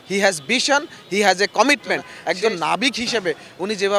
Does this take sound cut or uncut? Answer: cut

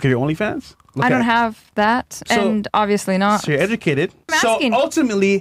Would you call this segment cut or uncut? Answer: cut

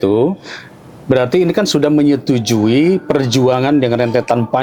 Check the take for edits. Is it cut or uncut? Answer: uncut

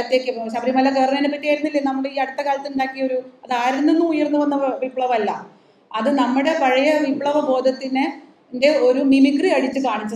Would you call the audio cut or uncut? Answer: uncut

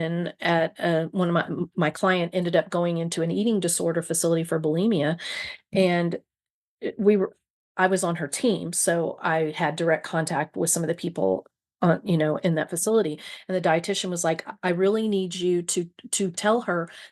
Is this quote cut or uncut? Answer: uncut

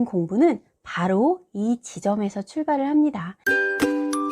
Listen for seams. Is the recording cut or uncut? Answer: cut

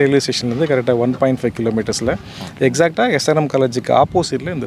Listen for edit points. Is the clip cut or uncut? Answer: uncut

